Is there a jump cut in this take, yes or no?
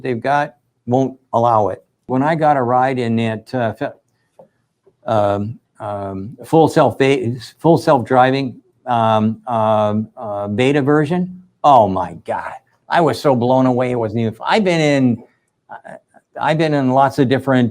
no